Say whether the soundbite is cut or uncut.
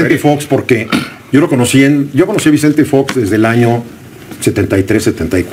uncut